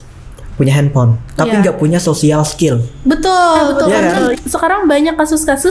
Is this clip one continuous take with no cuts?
no; 1 cut; at 4.3 s

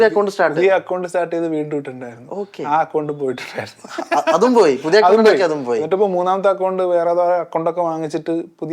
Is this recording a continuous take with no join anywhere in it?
yes; 0 cuts

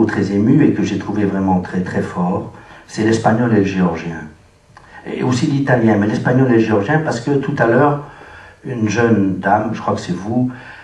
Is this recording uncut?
yes; 0 cuts

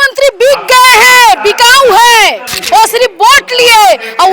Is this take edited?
yes; 1 cut; at 2.5 s

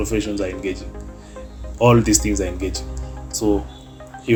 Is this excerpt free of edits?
yes; 0 cuts

